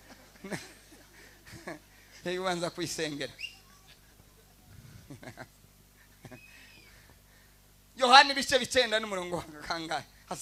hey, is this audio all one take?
yes; 0 cuts

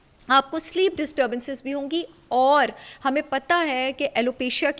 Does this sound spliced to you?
no; 0 cuts

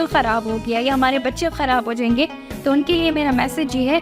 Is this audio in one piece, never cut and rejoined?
yes; 0 cuts

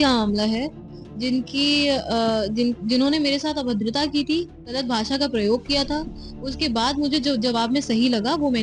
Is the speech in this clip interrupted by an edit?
no; 0 cuts

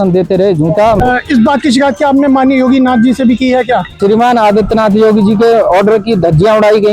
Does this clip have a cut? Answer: yes; 2 cuts; at 1.0 s, 4.0 s

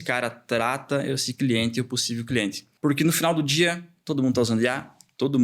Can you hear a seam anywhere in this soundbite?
yes; 1 cut; at 2.6 s

